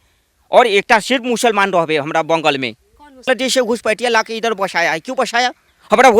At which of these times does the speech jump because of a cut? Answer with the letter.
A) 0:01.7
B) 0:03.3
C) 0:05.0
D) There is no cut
B